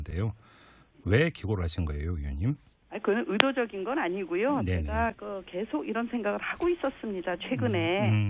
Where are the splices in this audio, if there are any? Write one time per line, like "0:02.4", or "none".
none